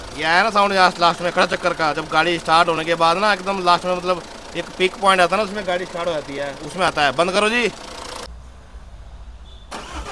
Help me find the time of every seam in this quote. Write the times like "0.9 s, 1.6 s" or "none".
8.3 s